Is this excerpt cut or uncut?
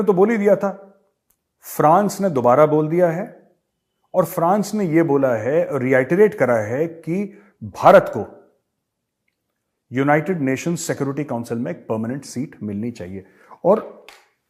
uncut